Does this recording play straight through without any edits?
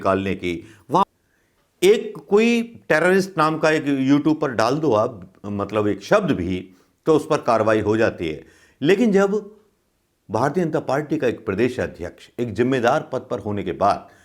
no; 1 cut; at 1.1 s

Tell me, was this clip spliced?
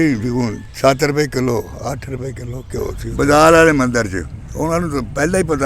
yes; 1 cut; at 3.0 s

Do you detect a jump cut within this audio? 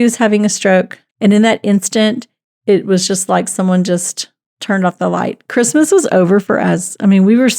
yes; 1 cut; at 1.0 s

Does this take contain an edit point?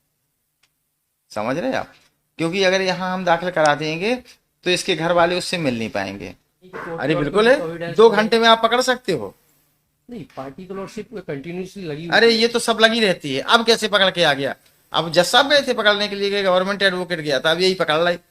yes; 1 cut; at 6.7 s

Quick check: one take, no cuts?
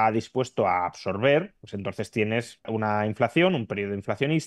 no; 2 cuts; at 1.6 s, 2.7 s

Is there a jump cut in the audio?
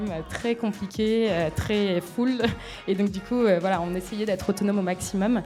no; 0 cuts

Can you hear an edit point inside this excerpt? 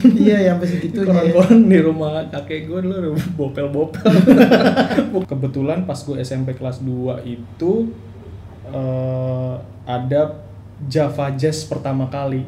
yes; 1 cut; at 5.3 s

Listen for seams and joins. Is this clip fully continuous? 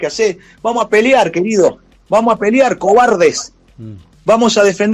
yes; 0 cuts

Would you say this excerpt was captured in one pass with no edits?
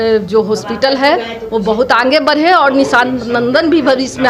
yes; 0 cuts

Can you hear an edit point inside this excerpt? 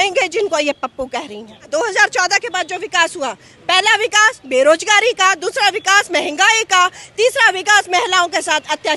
yes; 1 cut; at 1.7 s

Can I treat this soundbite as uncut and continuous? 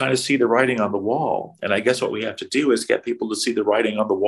yes; 0 cuts

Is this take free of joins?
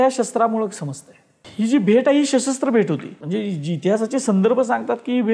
no; 2 cuts; at 1.5 s, 3.1 s

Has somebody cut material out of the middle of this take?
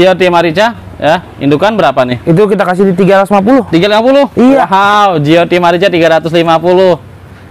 no; 0 cuts

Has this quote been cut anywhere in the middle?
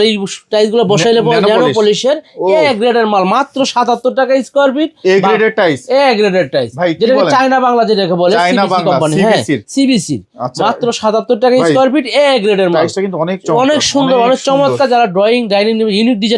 no; 0 cuts

